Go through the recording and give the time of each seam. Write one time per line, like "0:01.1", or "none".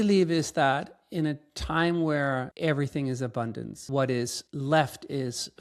0:02.5
0:03.7
0:04.4